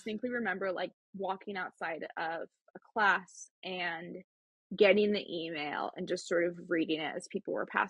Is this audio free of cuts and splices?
yes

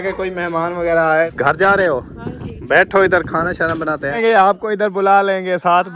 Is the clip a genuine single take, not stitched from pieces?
no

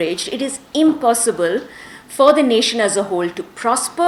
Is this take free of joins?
yes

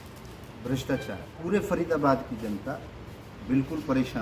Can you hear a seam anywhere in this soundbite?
yes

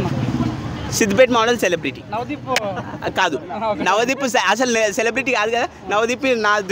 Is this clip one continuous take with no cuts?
yes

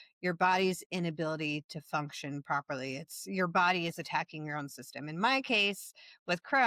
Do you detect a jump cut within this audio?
no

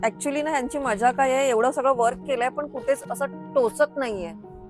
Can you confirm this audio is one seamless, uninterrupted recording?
yes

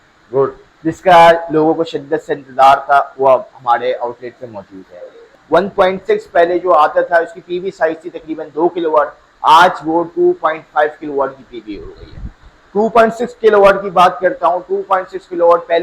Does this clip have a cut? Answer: yes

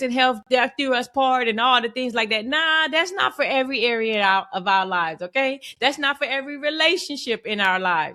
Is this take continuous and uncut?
yes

